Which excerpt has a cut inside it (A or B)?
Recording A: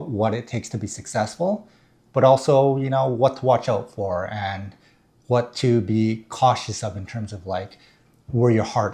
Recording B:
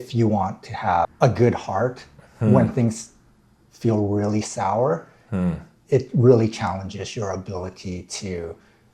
B